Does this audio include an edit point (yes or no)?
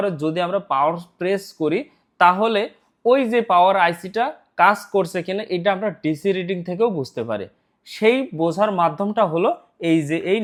no